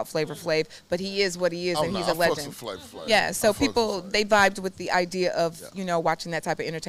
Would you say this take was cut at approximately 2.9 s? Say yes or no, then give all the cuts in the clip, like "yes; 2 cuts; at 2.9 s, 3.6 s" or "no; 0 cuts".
no; 0 cuts